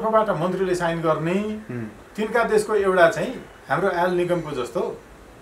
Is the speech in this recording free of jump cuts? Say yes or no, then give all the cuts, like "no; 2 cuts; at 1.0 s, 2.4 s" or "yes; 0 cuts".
yes; 0 cuts